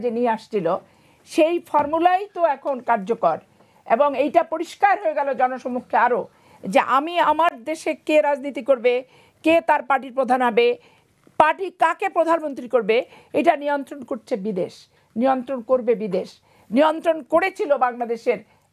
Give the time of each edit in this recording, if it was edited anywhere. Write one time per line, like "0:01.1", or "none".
none